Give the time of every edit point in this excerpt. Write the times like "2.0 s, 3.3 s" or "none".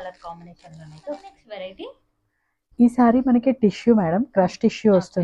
none